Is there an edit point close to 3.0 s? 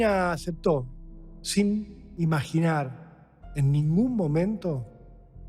no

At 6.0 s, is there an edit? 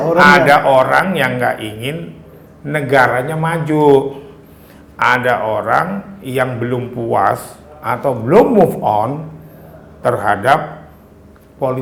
no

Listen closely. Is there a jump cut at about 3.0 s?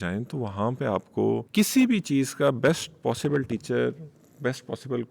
no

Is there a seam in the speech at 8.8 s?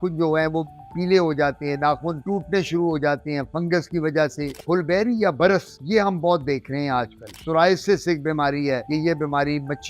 yes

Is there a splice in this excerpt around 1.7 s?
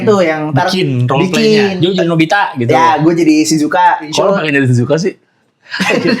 yes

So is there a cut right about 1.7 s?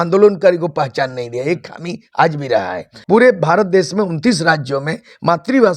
no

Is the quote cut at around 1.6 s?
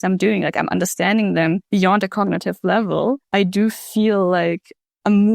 yes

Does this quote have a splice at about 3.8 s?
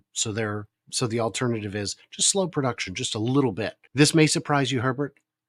yes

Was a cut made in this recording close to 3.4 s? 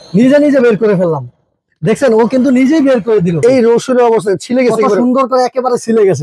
yes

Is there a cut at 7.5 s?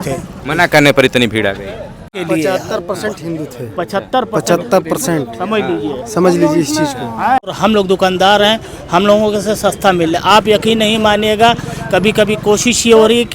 yes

